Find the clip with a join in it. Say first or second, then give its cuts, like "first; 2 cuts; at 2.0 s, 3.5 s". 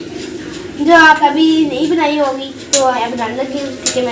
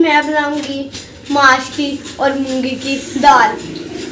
first; 2 cuts; at 1.3 s, 3.0 s